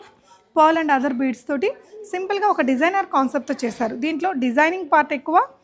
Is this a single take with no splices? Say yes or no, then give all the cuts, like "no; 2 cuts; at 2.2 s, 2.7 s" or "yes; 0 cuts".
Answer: yes; 0 cuts